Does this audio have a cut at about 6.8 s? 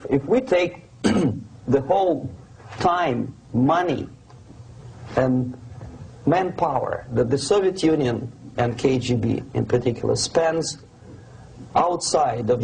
yes; 1 cut; at 6.8 s

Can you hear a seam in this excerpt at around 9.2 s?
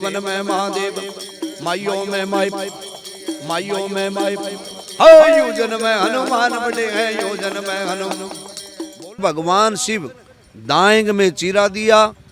yes; 1 cut; at 9.2 s

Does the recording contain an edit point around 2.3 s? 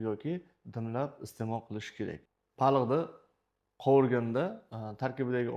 no; 0 cuts

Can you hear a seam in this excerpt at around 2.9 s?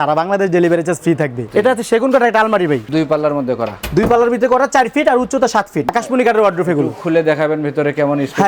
yes; 3 cuts; at 1.5 s, 2.9 s, 5.9 s

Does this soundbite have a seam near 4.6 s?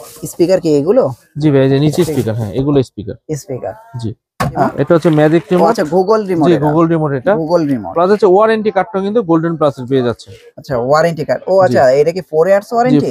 yes; 1 cut; at 4.6 s

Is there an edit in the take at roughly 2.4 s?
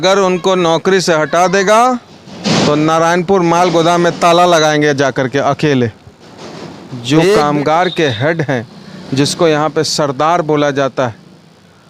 no; 1 cut; at 7.4 s

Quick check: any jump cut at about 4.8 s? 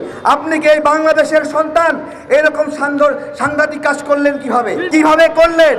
yes; 1 cut; at 4.8 s

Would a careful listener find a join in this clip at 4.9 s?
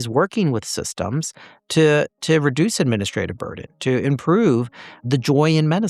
yes; 1 cut; at 4.9 s

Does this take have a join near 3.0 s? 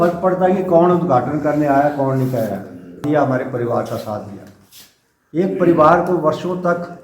yes; 1 cut; at 3.0 s

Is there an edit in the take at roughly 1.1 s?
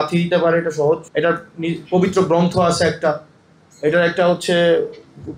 yes; 1 cut; at 1.1 s

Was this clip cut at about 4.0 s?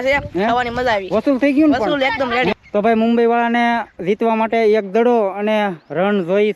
no; 1 cut; at 2.5 s

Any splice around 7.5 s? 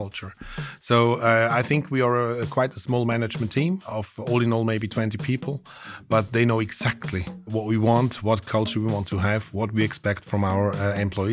yes; 2 cuts; at 3.9 s, 7.5 s

